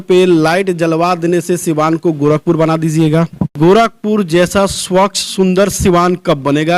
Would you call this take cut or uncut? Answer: cut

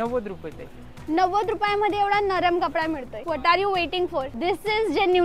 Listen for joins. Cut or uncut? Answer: cut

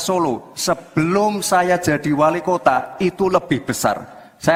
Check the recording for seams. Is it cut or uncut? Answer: uncut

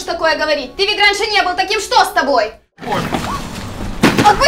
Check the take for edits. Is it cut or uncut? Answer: cut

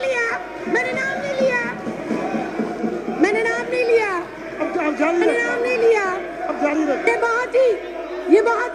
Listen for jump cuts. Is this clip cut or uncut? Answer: uncut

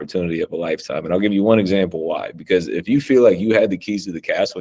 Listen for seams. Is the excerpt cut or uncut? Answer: uncut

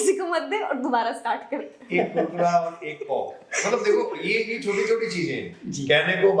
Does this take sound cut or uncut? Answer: uncut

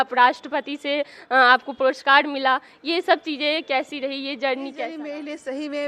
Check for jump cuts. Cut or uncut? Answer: cut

